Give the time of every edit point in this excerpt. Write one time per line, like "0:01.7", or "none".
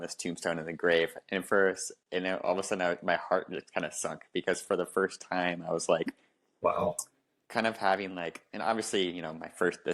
none